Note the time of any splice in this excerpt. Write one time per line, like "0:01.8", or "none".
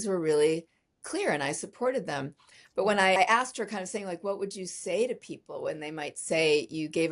0:03.2